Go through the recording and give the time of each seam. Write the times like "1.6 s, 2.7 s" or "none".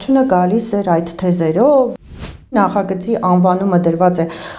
2.5 s